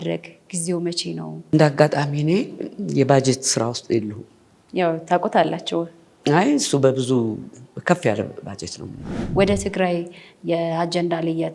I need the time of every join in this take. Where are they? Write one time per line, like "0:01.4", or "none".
0:01.5
0:09.2